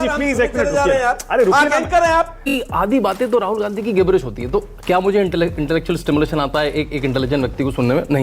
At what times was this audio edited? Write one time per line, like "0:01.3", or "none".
0:02.4

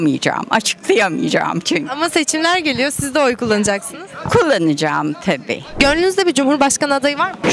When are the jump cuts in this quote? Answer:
none

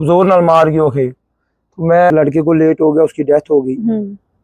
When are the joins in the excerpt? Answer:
0:02.4

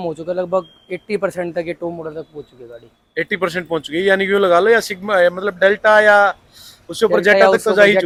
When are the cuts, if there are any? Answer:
none

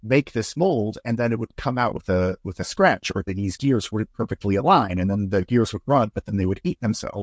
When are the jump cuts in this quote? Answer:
none

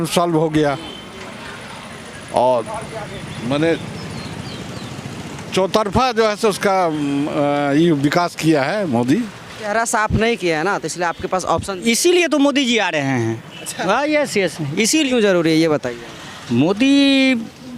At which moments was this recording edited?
0:09.7
0:15.1

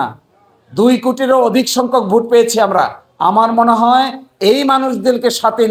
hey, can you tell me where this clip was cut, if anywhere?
none

